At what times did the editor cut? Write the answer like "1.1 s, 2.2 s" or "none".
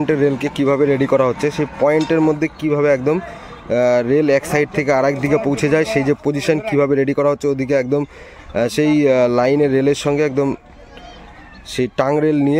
none

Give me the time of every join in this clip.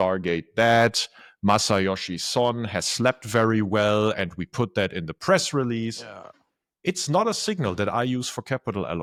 none

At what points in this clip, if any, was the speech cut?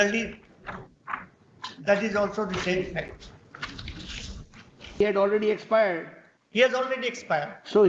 5.0 s

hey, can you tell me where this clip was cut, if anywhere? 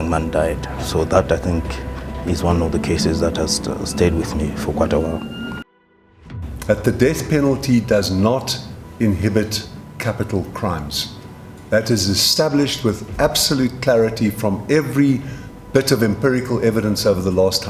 6.0 s

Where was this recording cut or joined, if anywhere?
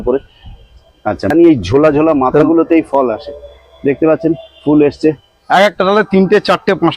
1.3 s

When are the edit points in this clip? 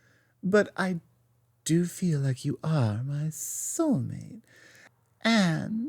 4.9 s

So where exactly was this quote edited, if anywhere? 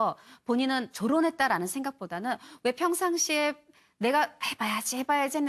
2.4 s

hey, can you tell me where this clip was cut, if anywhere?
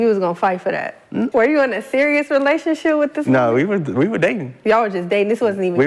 1.3 s

